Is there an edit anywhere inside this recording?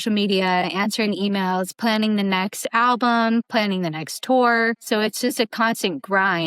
yes; 2 cuts; at 3.5 s, 4.8 s

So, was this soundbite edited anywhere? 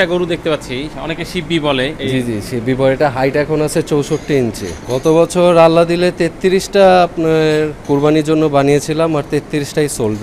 yes; 4 cuts; at 1.0 s, 2.0 s, 4.7 s, 7.8 s

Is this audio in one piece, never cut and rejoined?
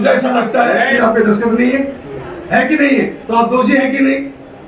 no; 1 cut; at 0.9 s

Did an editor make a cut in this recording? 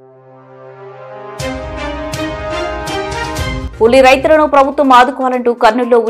yes; 1 cut; at 3.6 s

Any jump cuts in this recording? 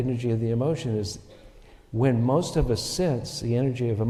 no; 0 cuts

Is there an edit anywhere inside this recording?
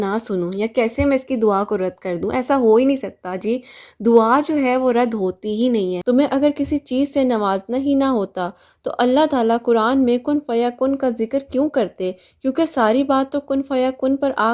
yes; 1 cut; at 6.0 s

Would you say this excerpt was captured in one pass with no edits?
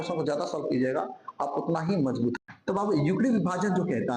no; 1 cut; at 2.4 s

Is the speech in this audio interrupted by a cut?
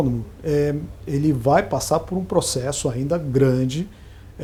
no; 0 cuts

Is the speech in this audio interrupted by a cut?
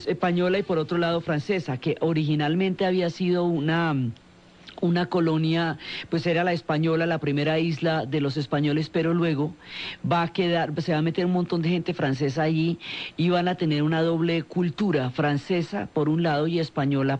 yes; 1 cut; at 9.2 s

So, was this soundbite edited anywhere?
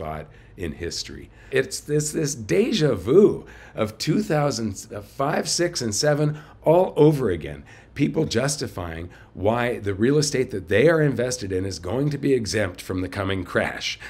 yes; 1 cut; at 1.5 s

